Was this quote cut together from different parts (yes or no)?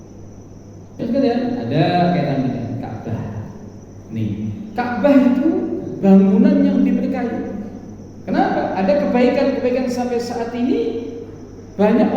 yes